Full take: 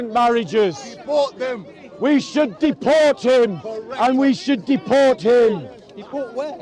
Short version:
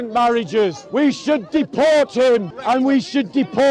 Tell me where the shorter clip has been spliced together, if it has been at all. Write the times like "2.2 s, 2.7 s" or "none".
0.8 s, 2.5 s